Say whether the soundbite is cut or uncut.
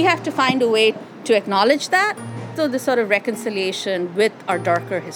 cut